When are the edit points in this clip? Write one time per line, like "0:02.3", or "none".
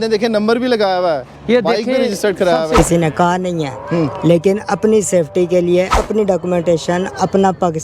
0:02.8
0:05.9